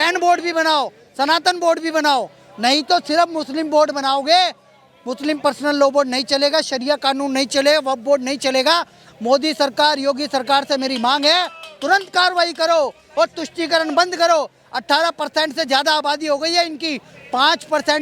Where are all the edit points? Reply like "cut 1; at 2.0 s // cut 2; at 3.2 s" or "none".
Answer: none